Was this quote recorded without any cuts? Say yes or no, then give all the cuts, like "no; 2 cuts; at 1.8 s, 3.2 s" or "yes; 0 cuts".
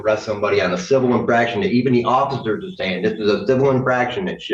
yes; 0 cuts